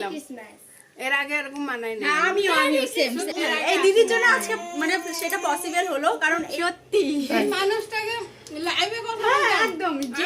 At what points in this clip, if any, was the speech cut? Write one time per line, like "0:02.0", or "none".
0:03.3
0:06.6